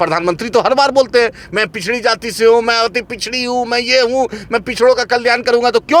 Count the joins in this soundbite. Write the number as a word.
zero